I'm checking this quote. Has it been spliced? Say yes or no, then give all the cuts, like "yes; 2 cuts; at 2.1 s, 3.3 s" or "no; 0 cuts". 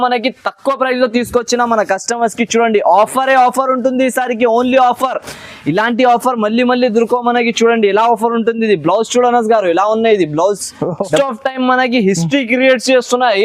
yes; 1 cut; at 11.2 s